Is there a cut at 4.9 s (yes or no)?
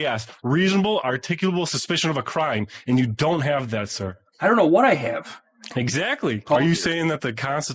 no